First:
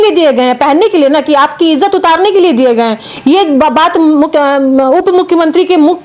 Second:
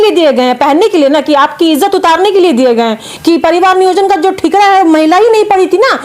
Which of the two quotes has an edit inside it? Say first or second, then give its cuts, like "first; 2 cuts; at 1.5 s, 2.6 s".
second; 1 cut; at 3.1 s